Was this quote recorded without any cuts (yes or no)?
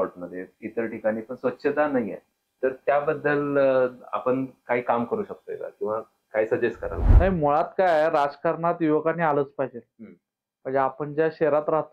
no